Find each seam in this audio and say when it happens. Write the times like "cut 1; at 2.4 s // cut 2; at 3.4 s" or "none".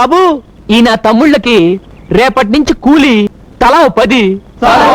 cut 1; at 3.4 s